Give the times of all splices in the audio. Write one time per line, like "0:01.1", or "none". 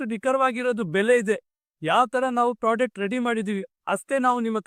none